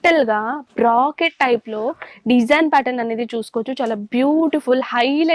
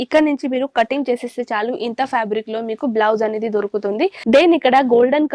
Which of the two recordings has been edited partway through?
second; 1 cut; at 4.2 s

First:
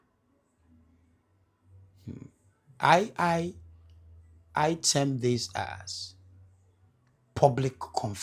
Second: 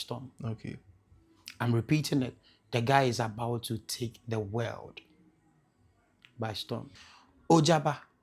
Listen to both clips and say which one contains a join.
second; 1 cut; at 6.9 s

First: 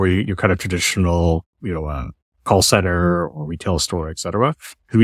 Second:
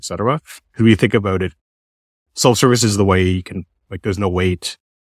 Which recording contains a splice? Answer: first; 1 cut; at 1.5 s

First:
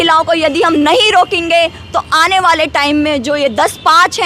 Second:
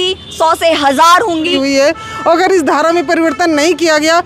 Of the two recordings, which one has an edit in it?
second; 1 cut; at 1.5 s

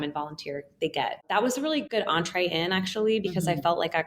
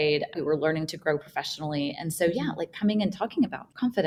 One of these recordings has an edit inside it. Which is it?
first; 1 cut; at 1.2 s

